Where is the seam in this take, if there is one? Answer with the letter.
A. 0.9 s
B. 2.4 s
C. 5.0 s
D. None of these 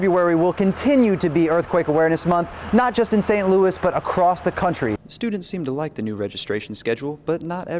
C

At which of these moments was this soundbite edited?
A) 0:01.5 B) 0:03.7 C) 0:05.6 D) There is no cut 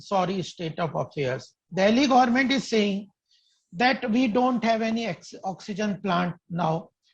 A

